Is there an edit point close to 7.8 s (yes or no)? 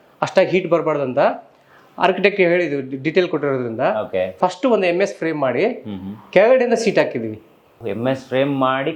yes